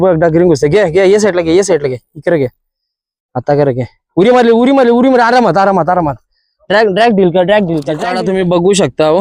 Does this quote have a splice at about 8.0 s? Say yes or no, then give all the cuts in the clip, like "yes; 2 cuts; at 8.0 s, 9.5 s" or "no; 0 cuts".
yes; 1 cut; at 8.0 s